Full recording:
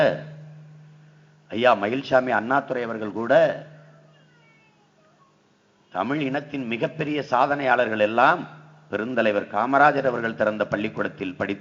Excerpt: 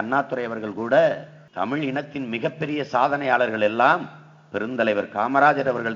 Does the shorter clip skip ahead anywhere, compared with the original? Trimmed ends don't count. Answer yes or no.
yes